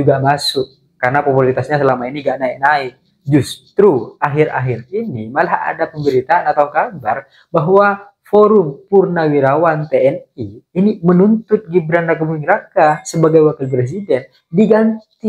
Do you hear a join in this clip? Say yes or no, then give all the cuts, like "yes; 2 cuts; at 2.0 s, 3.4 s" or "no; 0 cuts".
no; 0 cuts